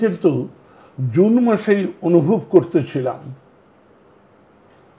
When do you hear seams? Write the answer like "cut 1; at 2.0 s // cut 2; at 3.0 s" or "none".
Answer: none